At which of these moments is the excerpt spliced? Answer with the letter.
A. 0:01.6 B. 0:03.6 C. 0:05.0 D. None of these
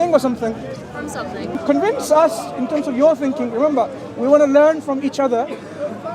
A